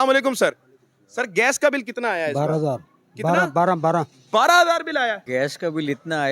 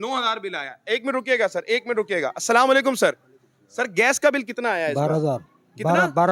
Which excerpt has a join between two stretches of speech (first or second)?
first